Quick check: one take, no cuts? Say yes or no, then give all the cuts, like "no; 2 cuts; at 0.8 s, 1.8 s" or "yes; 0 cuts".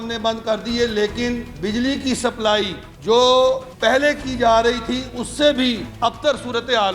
no; 3 cuts; at 2.8 s, 3.7 s, 5.9 s